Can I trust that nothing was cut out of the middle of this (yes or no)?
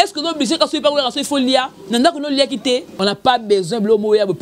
no